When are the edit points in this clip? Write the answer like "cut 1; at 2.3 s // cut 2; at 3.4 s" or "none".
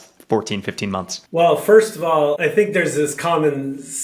cut 1; at 1.2 s // cut 2; at 2.4 s